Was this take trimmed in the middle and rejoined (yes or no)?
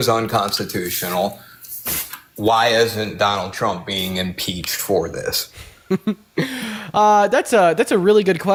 no